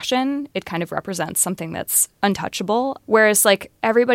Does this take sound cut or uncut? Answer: cut